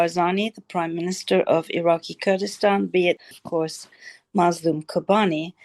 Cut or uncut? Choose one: cut